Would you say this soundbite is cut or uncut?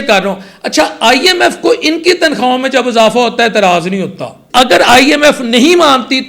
cut